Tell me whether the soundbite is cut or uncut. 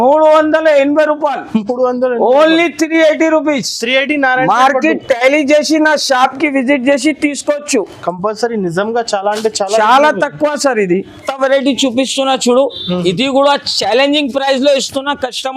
uncut